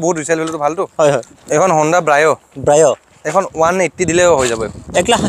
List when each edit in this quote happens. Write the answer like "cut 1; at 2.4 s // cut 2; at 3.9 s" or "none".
cut 1; at 1.3 s

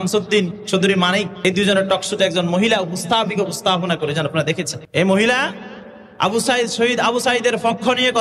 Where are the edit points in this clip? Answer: cut 1; at 1.3 s // cut 2; at 4.8 s

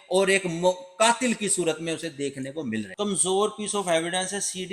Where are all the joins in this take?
cut 1; at 2.9 s

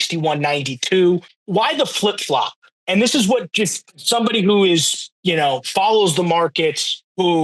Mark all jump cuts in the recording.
cut 1; at 1.3 s

